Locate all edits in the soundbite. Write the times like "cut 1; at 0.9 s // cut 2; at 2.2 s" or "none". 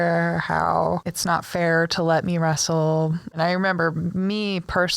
cut 1; at 1.1 s // cut 2; at 3.3 s